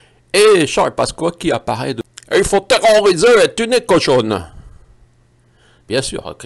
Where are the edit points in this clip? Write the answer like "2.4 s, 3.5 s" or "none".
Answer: 2.0 s